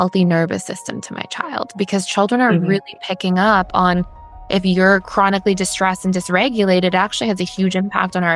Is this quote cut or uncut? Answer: uncut